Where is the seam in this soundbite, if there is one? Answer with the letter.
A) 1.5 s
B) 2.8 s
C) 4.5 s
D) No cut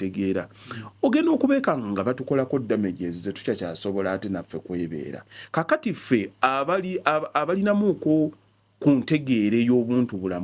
D